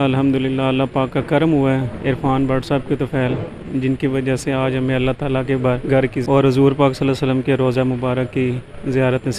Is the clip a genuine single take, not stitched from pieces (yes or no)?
yes